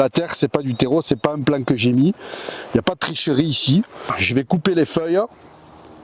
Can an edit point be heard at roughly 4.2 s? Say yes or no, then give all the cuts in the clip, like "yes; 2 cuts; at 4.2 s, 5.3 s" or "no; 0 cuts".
yes; 1 cut; at 4.2 s